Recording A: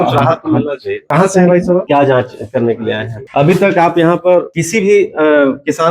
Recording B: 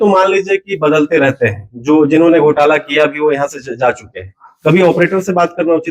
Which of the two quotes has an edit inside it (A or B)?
A